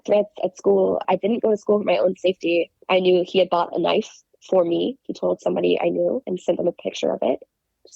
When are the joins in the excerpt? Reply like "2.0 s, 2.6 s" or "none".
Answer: 6.3 s